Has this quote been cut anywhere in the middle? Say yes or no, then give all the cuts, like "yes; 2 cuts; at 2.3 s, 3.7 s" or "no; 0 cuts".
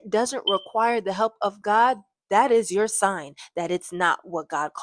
no; 0 cuts